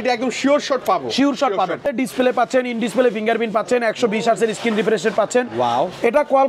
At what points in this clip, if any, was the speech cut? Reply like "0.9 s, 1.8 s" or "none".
1.8 s